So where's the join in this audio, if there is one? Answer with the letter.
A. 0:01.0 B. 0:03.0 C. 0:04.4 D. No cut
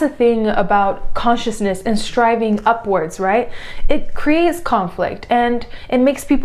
D